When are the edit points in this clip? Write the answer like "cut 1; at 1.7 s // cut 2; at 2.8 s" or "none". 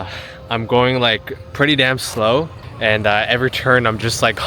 cut 1; at 2.6 s